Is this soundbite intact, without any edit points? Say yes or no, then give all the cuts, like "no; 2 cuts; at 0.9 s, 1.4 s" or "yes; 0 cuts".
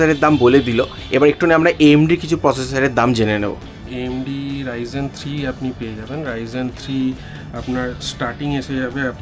yes; 0 cuts